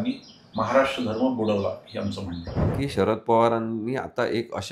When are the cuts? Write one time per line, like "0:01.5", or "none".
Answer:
0:02.8